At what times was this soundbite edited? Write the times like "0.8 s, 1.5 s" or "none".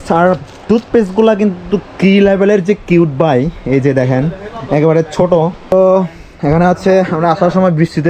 5.7 s